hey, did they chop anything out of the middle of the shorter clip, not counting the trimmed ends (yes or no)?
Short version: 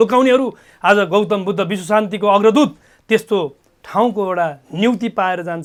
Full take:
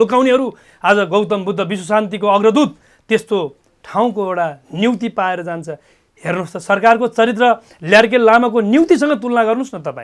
no